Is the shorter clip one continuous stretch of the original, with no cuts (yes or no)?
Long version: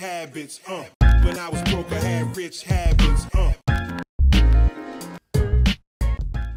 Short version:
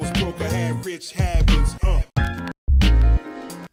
yes